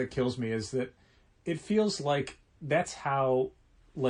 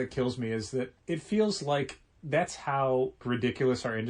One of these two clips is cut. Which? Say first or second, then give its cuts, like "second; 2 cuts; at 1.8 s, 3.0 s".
second; 2 cuts; at 1.0 s, 3.2 s